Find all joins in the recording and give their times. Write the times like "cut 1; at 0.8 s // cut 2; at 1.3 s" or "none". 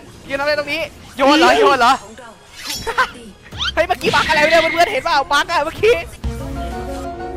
cut 1; at 6.2 s